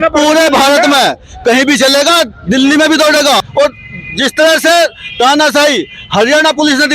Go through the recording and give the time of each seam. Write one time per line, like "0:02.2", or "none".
0:03.4